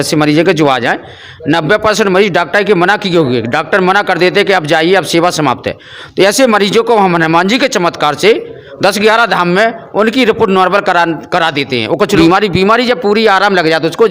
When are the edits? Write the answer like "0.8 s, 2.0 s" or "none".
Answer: 12.1 s

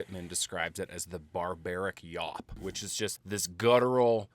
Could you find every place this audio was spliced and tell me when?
2.5 s

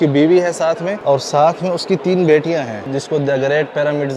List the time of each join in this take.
0.9 s, 2.9 s

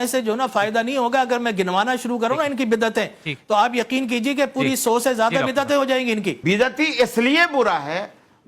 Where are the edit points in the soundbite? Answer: 6.4 s

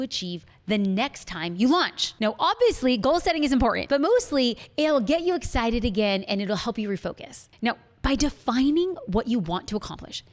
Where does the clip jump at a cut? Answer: 3.8 s

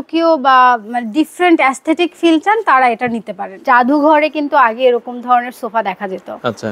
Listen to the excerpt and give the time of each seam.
3.6 s

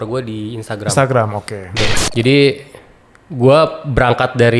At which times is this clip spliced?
1.9 s

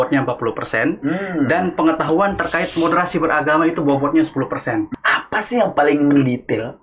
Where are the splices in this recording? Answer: 4.9 s

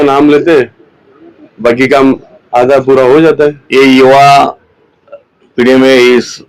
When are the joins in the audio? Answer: 3.6 s

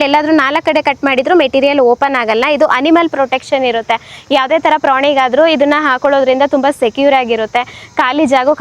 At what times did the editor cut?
none

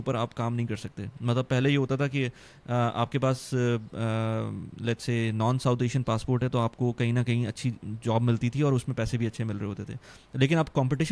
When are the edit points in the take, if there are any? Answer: none

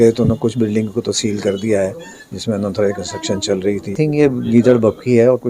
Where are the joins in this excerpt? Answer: 4.0 s

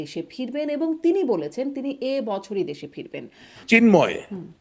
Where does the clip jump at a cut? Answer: 3.5 s

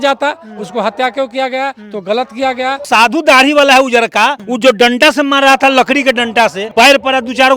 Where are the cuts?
2.8 s, 4.4 s, 6.6 s

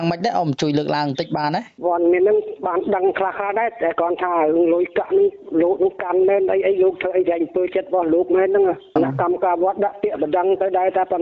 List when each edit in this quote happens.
1.7 s, 8.8 s

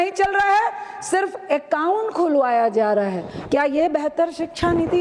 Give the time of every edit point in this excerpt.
none

